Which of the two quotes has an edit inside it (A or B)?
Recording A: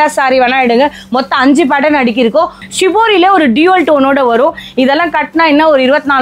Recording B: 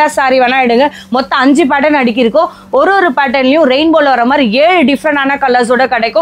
A